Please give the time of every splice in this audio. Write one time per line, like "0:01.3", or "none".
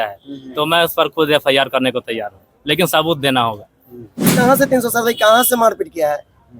0:04.3